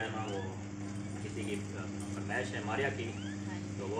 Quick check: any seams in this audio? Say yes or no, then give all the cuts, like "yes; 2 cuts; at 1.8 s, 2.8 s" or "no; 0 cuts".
no; 0 cuts